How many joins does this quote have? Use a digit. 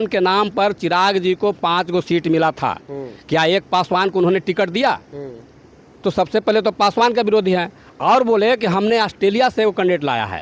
0